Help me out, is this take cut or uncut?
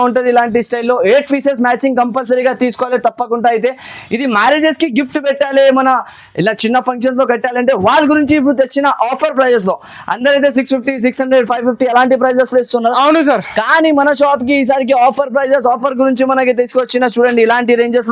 uncut